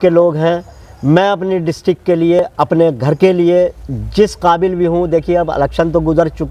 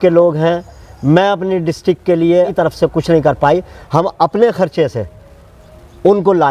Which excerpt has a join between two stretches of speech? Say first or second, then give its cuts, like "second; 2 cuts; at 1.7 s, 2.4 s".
second; 1 cut; at 2.5 s